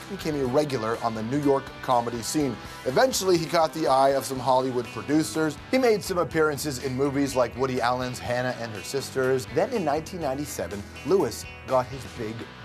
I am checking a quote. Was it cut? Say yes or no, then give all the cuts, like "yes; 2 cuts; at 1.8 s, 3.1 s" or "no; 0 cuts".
yes; 1 cut; at 8.8 s